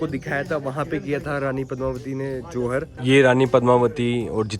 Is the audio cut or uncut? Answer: cut